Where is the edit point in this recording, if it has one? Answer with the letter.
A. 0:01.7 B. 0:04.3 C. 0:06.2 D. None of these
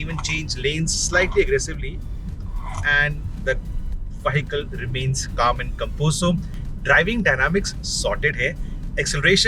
D